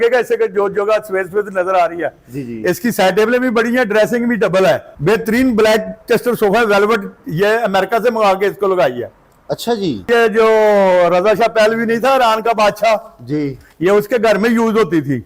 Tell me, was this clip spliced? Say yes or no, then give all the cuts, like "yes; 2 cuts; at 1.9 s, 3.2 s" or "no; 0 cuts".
yes; 2 cuts; at 4.9 s, 10.1 s